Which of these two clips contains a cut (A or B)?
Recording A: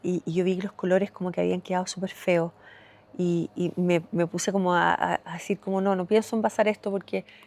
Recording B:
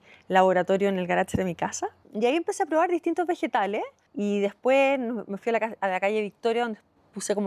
B